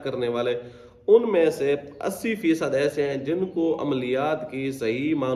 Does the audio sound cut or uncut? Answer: uncut